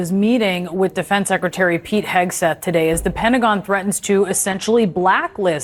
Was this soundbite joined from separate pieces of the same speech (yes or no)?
no